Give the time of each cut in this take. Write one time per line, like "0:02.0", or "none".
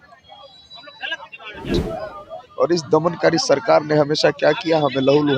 0:01.6